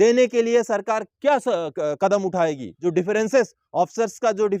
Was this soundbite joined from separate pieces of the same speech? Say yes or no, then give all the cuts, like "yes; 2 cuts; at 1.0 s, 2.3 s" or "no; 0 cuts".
yes; 1 cut; at 2.7 s